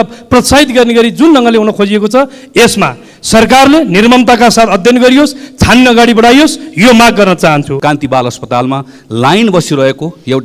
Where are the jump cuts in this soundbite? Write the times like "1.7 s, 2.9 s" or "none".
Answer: 7.7 s